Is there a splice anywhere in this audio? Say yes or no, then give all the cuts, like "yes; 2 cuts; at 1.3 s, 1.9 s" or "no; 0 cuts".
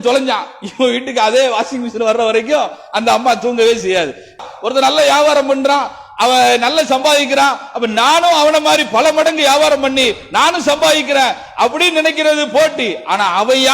yes; 1 cut; at 4.4 s